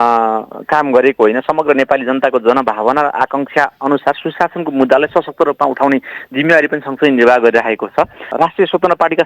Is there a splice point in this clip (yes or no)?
yes